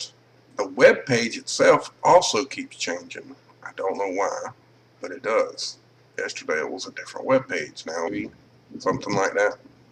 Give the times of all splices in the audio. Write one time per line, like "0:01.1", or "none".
none